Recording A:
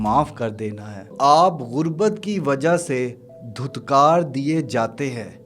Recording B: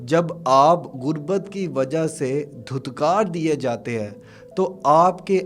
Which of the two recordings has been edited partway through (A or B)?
A